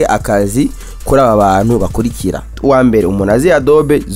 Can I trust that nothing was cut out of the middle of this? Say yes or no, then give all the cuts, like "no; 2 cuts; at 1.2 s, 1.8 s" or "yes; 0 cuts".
no; 1 cut; at 2.6 s